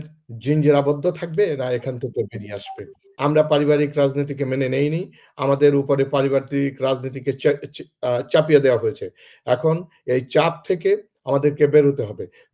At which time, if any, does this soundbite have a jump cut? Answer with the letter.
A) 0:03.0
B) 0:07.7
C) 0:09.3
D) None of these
A